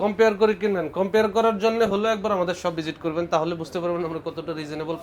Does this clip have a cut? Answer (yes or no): no